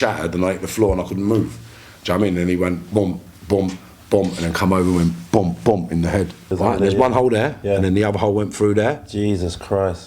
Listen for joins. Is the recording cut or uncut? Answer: cut